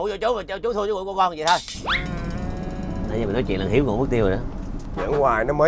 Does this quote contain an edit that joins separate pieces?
yes; 1 cut; at 1.8 s

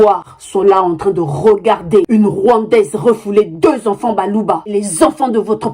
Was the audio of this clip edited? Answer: yes; 1 cut; at 4.6 s

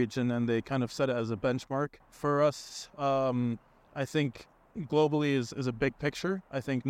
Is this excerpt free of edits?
no; 1 cut; at 2.0 s

